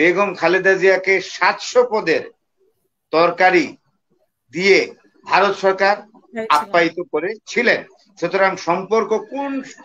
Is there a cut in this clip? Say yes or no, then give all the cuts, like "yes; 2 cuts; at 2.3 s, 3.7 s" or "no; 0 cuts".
no; 0 cuts